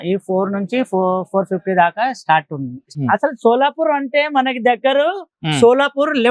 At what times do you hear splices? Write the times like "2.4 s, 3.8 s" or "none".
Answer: 2.8 s